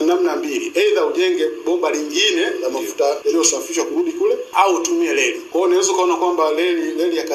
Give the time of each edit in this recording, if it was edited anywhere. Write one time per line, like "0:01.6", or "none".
0:03.2
0:04.5
0:05.4